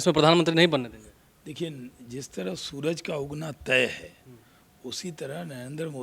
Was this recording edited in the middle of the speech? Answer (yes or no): no